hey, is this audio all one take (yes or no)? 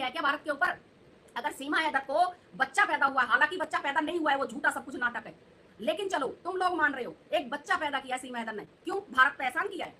yes